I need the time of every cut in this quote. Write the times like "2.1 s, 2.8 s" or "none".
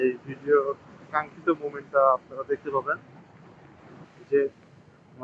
4.1 s